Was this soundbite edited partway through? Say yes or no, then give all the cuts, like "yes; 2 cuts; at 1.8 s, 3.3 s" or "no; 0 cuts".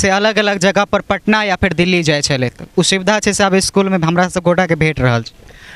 no; 0 cuts